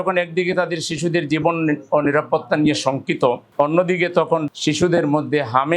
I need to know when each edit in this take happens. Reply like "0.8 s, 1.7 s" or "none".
4.4 s